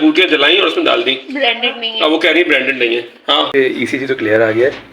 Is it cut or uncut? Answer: cut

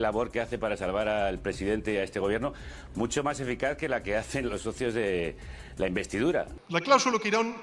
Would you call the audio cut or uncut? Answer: cut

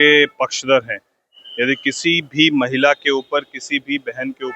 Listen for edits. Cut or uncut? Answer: uncut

